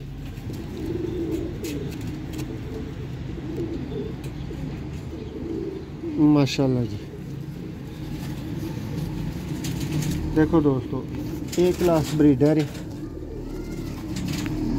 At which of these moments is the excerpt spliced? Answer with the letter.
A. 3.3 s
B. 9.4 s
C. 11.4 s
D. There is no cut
D